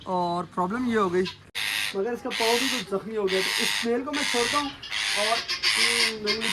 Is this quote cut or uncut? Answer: cut